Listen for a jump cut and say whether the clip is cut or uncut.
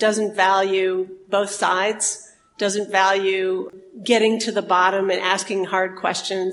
uncut